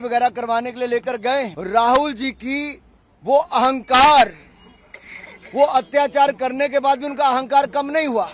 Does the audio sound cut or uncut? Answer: cut